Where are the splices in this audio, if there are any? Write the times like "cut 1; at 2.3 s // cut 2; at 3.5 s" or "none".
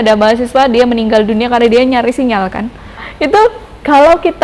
cut 1; at 3.1 s